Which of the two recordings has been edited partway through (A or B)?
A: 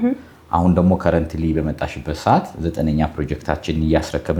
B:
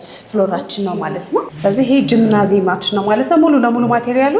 B